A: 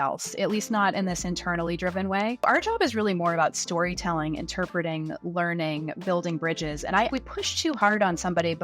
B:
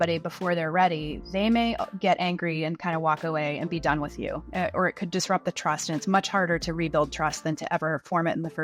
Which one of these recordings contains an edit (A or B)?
A